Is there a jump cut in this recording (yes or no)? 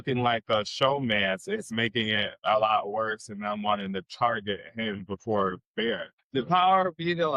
yes